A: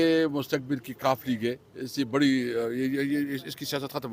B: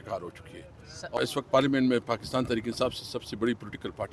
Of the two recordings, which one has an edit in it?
B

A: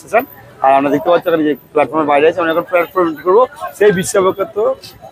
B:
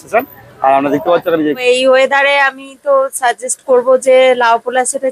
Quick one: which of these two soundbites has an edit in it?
B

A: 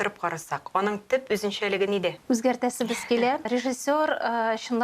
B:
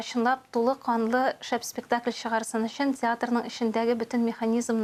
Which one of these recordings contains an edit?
A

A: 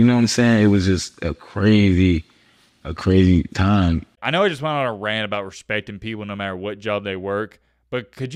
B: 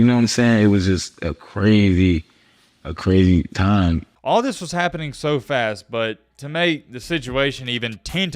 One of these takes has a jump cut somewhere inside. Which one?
B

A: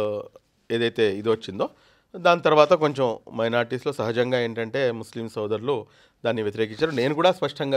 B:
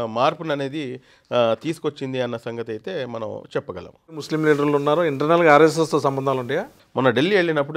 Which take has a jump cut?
B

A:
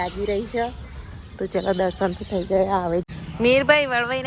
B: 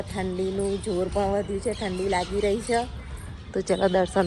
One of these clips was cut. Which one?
A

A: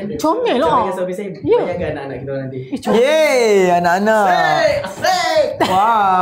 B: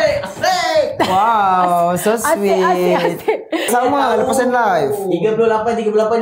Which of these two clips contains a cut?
B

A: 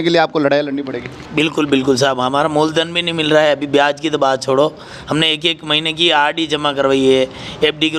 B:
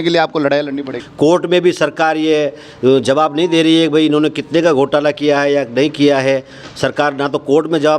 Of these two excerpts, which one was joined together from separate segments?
B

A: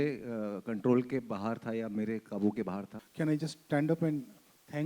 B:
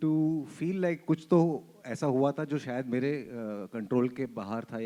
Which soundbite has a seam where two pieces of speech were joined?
A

